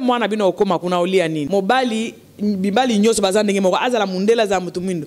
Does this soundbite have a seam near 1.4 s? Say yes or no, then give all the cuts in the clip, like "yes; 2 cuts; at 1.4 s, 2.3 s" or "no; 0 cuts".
yes; 1 cut; at 1.4 s